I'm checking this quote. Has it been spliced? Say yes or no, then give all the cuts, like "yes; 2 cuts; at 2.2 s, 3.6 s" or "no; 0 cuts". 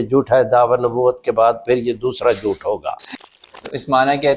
yes; 1 cut; at 3.3 s